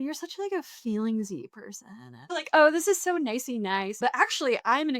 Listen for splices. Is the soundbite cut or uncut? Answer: cut